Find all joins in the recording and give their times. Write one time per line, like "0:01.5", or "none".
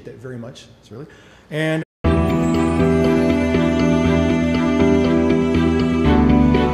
none